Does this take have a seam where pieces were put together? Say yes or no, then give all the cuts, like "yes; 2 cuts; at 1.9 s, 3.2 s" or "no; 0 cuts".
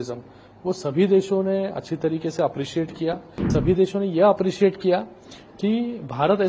yes; 1 cut; at 3.5 s